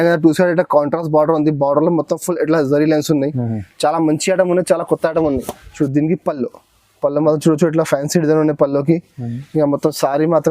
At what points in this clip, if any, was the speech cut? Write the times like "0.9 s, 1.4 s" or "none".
5.6 s